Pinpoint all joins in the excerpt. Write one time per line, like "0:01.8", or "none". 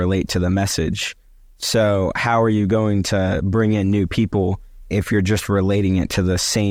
none